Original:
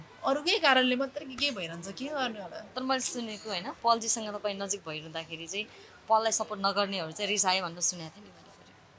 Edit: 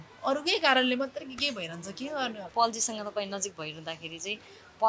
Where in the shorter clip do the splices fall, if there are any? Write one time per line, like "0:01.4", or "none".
0:02.5